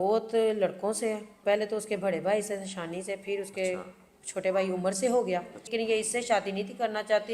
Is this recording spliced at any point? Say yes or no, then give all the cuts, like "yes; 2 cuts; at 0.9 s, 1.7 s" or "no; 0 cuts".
yes; 2 cuts; at 1.4 s, 5.7 s